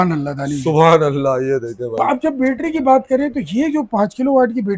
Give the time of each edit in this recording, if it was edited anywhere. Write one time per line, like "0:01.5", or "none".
0:01.8

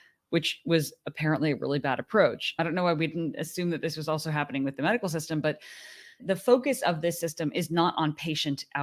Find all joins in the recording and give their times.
0:02.5

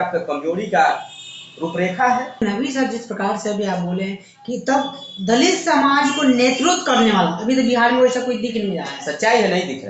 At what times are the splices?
0:02.4

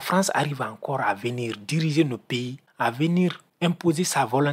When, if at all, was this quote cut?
0:02.6
0:03.5

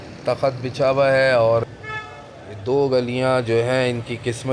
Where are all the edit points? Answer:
0:01.6

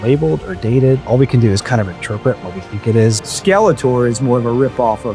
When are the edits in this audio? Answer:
0:03.2

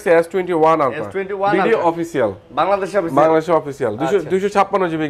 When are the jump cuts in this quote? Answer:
none

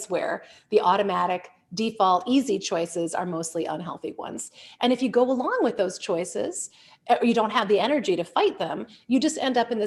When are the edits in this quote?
none

